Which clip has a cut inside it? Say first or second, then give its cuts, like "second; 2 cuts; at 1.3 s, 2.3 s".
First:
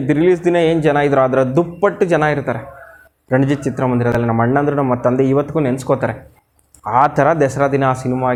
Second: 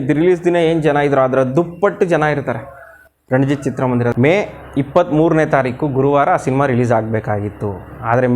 second; 1 cut; at 4.1 s